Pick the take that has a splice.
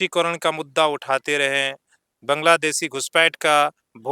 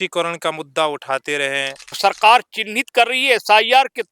second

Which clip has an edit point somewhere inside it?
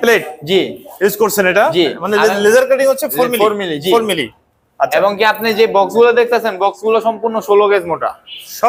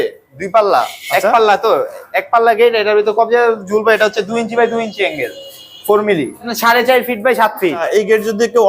second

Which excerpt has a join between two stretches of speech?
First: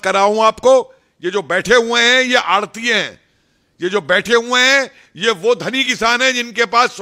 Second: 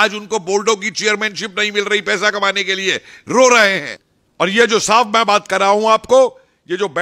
second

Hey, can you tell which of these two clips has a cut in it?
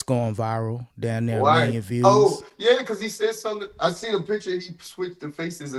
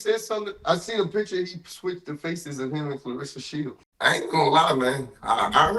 second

